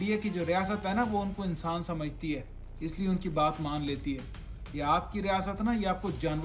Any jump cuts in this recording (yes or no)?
no